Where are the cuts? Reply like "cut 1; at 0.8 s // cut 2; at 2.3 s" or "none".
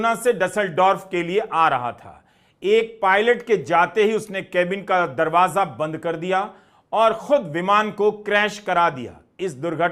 cut 1; at 8.2 s